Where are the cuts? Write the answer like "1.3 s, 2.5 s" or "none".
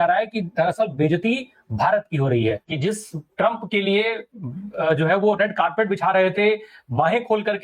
2.6 s